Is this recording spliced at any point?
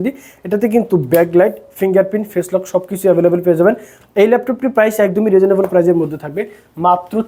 no; 0 cuts

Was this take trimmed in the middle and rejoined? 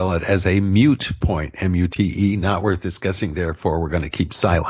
no; 0 cuts

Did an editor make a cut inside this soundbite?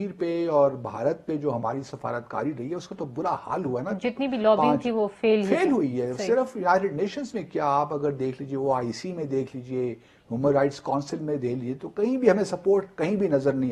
no; 0 cuts

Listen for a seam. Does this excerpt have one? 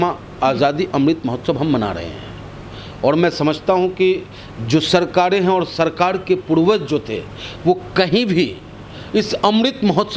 no; 0 cuts

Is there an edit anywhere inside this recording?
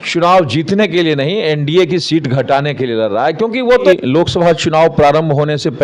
yes; 1 cut; at 3.6 s

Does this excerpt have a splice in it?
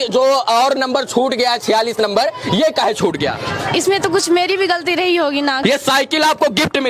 yes; 1 cut; at 5.6 s

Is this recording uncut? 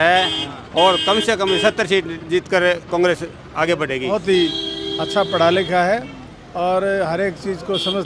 no; 1 cut; at 4.1 s

